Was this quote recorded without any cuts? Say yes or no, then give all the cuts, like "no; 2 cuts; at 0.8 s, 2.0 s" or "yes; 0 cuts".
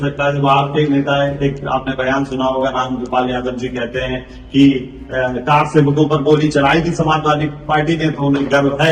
yes; 0 cuts